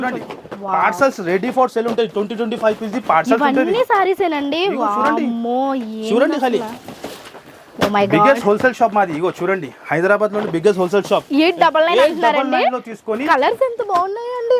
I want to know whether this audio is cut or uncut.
uncut